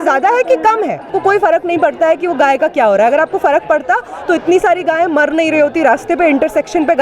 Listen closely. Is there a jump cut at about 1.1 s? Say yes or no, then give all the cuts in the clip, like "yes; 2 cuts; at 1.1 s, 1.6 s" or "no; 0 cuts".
yes; 1 cut; at 1.1 s